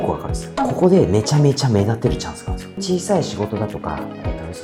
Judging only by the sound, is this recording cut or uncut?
uncut